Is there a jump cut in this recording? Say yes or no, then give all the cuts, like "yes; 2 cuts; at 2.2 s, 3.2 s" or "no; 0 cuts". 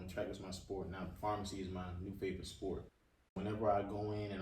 yes; 1 cut; at 3.4 s